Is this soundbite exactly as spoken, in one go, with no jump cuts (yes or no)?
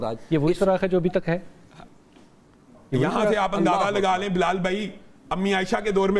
yes